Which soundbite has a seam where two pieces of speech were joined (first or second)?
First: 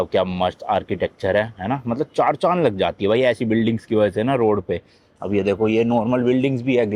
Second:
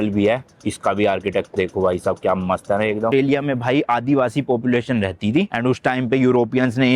second